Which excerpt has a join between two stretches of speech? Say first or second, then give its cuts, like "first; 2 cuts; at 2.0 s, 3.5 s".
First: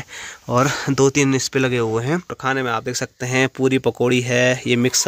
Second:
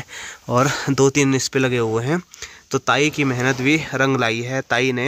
first; 1 cut; at 2.4 s